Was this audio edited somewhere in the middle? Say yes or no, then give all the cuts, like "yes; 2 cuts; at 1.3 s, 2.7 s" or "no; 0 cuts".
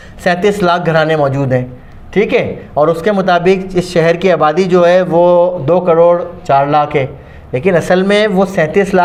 no; 0 cuts